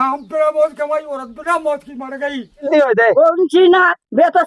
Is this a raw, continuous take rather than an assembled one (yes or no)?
no